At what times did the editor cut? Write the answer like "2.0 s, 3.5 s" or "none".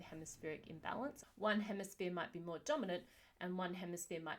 1.2 s